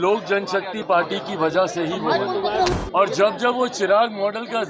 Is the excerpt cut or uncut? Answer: cut